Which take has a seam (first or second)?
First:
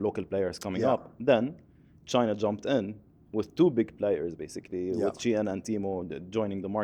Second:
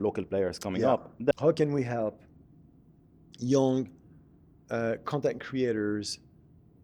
second